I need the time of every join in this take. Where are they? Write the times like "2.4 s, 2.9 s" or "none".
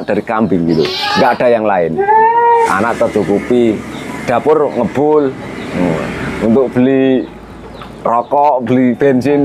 2.7 s